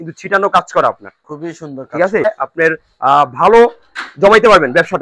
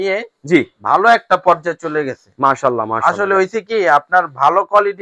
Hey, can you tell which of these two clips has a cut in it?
first; 1 cut; at 2.2 s

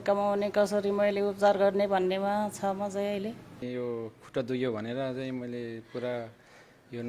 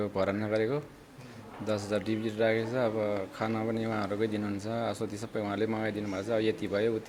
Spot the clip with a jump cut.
first; 1 cut; at 3.6 s

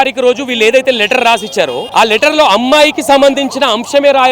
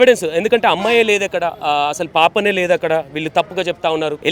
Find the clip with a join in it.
first; 1 cut; at 1.8 s

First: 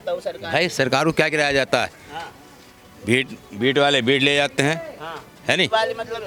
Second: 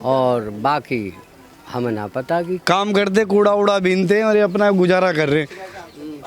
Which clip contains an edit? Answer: second; 1 cut; at 2.6 s

